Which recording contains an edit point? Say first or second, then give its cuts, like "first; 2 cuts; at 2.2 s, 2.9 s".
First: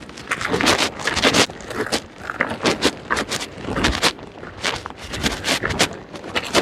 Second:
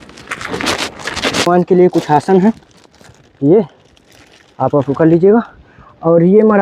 second; 1 cut; at 1.5 s